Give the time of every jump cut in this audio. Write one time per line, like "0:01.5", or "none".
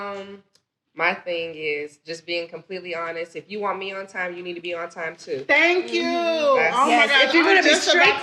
none